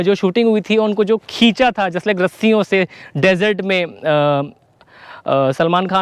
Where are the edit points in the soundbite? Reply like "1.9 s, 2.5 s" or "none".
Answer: none